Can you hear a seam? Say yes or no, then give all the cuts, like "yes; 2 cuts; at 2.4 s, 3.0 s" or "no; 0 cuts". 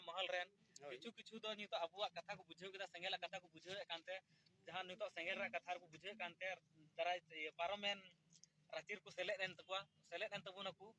no; 0 cuts